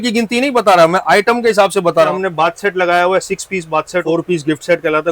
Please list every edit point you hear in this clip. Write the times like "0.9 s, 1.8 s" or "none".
2.1 s, 4.0 s